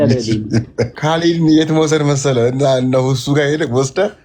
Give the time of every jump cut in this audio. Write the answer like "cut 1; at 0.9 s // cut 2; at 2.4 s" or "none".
cut 1; at 0.9 s